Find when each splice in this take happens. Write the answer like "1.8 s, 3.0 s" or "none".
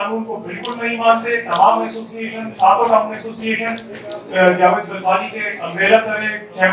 none